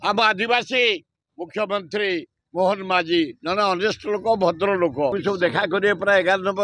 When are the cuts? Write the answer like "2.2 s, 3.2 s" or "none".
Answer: 5.2 s